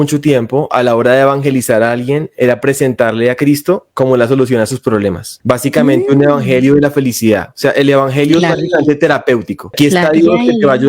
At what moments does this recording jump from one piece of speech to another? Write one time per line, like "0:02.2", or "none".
0:05.3
0:09.7